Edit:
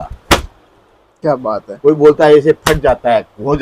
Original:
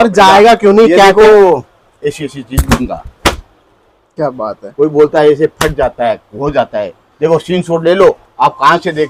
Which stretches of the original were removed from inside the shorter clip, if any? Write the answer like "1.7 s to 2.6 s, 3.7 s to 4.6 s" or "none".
none